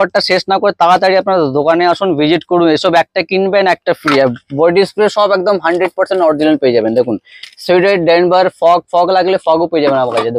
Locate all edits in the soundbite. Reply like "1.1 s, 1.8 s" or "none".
none